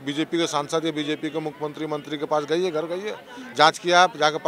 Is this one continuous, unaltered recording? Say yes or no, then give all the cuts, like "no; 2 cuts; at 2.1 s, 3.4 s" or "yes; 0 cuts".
yes; 0 cuts